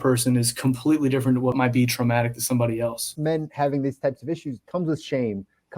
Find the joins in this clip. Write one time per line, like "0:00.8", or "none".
0:01.5
0:03.1
0:04.6